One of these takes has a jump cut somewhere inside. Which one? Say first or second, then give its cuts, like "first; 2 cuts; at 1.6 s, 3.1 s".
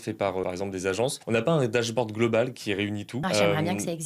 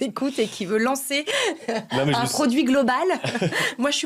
first; 2 cuts; at 0.9 s, 3.1 s